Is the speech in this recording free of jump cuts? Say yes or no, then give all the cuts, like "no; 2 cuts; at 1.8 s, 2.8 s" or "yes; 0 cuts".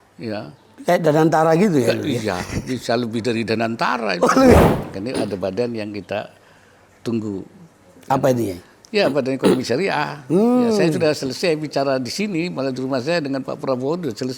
no; 1 cut; at 4.6 s